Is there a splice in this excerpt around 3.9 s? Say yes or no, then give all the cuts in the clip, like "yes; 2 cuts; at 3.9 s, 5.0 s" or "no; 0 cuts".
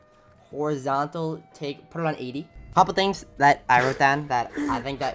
no; 1 cut; at 2.6 s